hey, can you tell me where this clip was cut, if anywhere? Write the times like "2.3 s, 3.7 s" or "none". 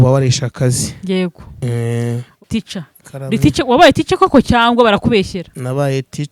2.5 s